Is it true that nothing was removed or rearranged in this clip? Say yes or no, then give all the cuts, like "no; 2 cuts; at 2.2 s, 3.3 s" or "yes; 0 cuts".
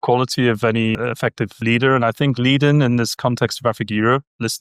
no; 1 cut; at 1.5 s